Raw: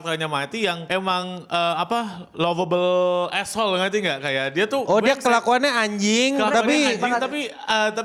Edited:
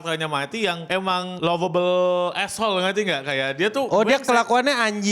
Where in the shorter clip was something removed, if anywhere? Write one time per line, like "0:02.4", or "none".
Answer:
0:01.3